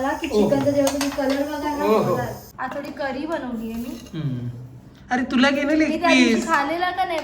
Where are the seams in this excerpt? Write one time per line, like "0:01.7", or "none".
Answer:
0:02.5